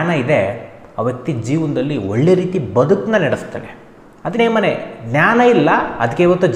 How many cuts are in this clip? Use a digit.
1